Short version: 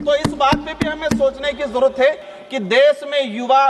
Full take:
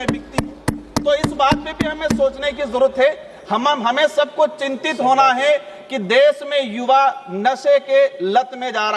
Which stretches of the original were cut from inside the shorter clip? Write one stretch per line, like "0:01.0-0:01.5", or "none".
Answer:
0:03.3-0:05.7